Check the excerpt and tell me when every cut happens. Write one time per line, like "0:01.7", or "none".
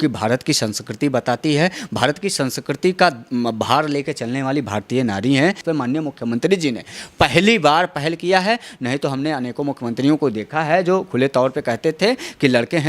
0:05.6